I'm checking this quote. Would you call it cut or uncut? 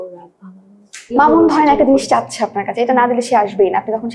cut